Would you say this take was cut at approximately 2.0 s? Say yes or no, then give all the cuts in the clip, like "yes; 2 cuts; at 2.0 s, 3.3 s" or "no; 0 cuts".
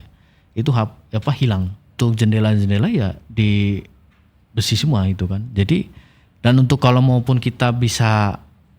yes; 1 cut; at 2.0 s